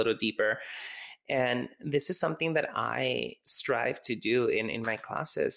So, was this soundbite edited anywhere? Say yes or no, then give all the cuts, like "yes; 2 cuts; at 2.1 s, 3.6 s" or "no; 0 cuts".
no; 0 cuts